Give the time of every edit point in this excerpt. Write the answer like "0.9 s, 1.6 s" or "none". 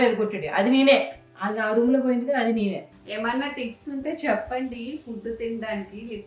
2.9 s